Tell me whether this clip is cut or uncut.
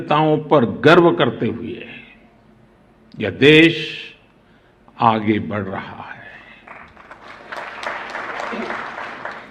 uncut